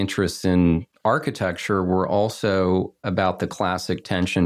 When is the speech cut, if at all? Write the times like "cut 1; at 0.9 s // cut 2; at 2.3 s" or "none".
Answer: cut 1; at 0.9 s // cut 2; at 3.0 s